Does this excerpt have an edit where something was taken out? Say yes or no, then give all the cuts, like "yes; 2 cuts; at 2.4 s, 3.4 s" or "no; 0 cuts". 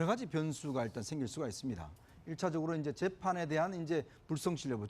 yes; 1 cut; at 3.4 s